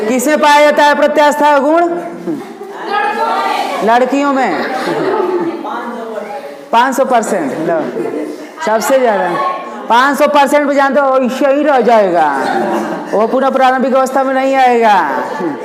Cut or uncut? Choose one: uncut